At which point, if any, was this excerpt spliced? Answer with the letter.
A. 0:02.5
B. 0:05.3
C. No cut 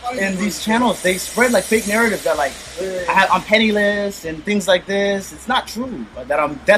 C